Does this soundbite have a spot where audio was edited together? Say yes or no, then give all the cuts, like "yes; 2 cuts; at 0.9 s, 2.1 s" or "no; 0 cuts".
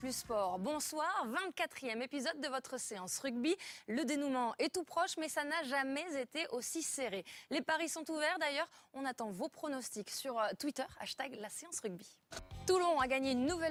no; 0 cuts